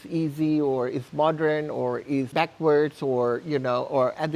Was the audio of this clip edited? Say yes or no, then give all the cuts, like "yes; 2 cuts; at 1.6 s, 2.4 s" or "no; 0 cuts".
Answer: yes; 1 cut; at 2.3 s